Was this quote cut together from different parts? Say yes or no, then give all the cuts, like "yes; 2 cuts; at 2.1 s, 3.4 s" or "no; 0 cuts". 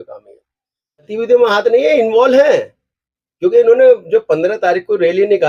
yes; 1 cut; at 1.1 s